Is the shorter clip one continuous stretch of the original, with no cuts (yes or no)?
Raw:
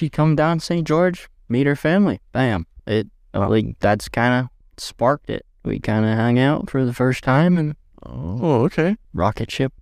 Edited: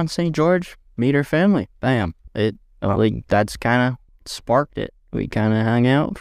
yes